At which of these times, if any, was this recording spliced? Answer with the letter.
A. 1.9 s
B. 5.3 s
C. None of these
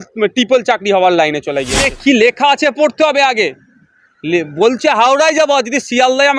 A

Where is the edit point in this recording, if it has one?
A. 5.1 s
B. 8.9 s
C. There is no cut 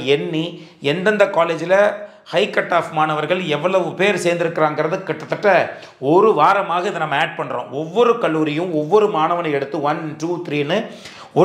C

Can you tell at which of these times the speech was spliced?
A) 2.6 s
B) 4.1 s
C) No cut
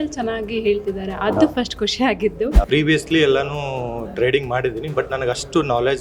A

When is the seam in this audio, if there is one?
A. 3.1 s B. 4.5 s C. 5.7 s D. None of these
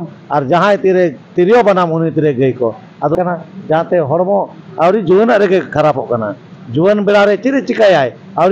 A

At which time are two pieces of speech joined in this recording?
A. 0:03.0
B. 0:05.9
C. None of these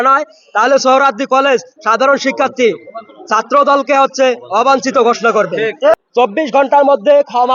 B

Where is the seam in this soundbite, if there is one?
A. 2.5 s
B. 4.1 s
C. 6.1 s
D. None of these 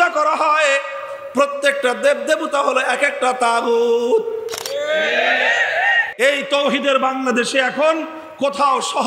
C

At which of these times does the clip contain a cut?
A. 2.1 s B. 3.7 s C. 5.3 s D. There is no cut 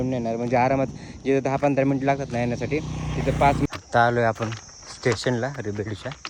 B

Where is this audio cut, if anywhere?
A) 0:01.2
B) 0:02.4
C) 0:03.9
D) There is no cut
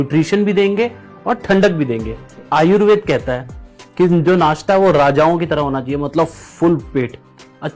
B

